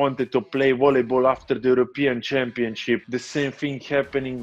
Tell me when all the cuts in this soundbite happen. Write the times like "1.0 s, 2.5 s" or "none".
3.0 s